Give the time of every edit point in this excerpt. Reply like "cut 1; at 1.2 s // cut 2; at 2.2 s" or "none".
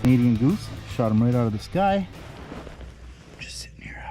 cut 1; at 2.2 s